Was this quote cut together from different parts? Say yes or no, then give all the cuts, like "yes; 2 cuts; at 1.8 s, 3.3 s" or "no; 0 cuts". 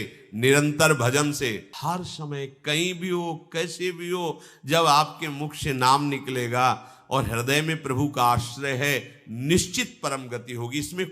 yes; 1 cut; at 1.7 s